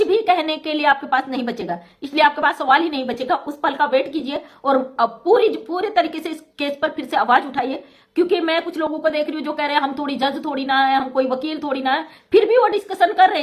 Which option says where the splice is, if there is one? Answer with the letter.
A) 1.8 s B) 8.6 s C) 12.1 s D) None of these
D